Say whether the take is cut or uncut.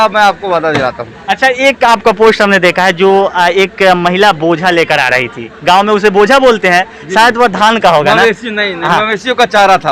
uncut